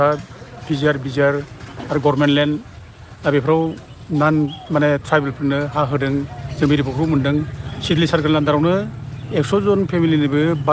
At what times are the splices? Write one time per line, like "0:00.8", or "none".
none